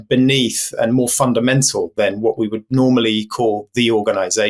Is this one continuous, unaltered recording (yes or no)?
yes